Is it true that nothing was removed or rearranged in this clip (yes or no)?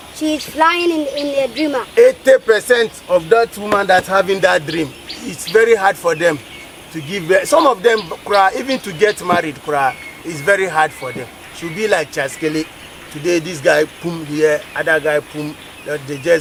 yes